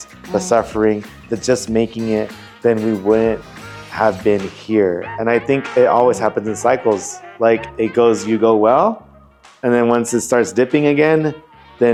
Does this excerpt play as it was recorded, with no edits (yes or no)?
yes